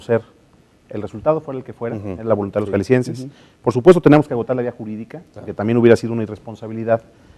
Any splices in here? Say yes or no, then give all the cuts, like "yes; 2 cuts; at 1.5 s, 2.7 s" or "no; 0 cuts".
yes; 1 cut; at 2.7 s